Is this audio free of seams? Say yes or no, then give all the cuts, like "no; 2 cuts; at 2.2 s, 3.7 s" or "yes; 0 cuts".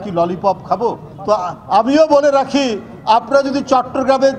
no; 1 cut; at 1.1 s